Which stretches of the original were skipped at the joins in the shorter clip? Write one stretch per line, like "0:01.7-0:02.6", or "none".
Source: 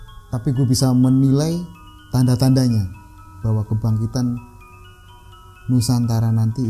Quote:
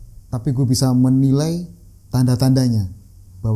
none